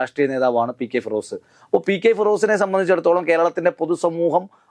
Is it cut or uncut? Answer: uncut